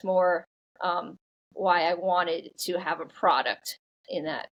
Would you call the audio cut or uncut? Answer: uncut